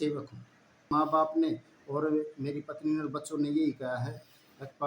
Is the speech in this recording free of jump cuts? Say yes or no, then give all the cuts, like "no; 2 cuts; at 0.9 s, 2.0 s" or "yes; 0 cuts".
no; 1 cut; at 0.9 s